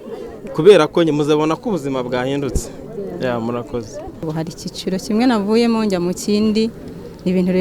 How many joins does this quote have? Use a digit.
1